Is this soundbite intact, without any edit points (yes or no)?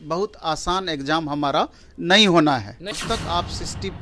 no